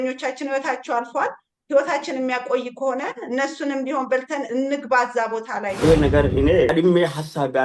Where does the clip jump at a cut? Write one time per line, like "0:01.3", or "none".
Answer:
0:05.7
0:06.7